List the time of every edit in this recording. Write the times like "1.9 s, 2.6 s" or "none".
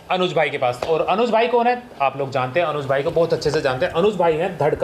none